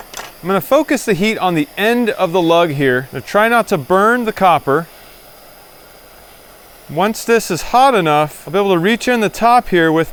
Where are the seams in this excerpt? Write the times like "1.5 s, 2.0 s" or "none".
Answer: none